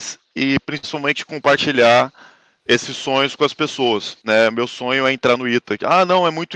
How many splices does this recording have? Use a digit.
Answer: 1